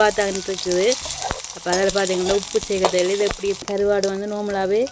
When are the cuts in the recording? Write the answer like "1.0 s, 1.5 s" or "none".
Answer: 3.6 s

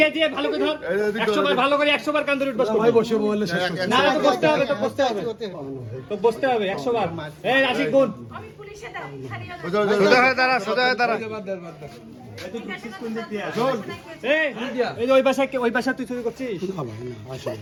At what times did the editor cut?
none

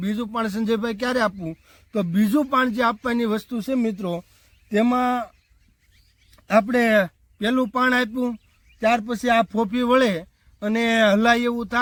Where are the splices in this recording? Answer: none

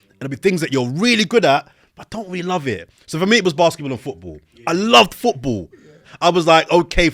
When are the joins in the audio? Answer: 6.0 s

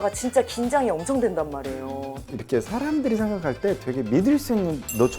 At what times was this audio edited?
2.2 s

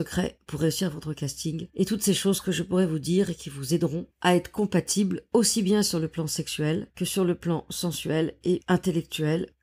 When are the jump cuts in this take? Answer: 8.6 s

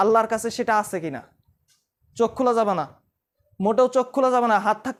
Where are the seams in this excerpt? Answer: none

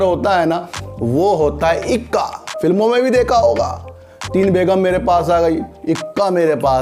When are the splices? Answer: none

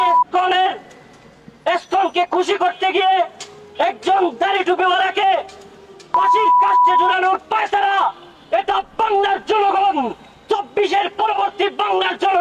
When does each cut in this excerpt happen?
none

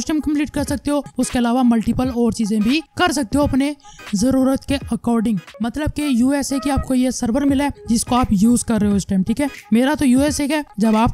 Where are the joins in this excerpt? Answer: 5.5 s

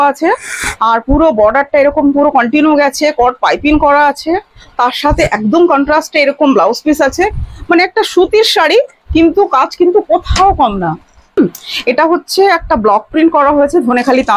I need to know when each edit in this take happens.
11.4 s

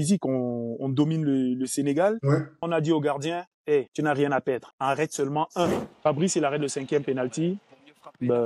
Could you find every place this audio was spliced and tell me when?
2.6 s, 3.9 s, 4.7 s, 5.9 s

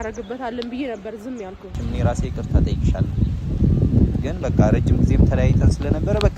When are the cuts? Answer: 1.8 s

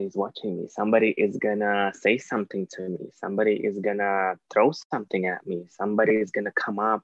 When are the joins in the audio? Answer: none

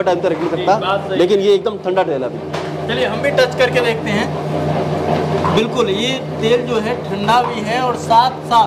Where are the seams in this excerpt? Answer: none

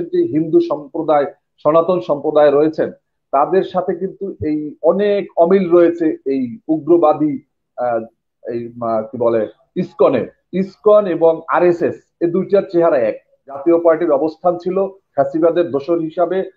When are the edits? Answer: 13.6 s

